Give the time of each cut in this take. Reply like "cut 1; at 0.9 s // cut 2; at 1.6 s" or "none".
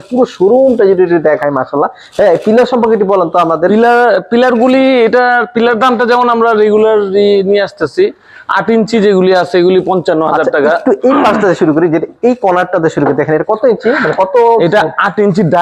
none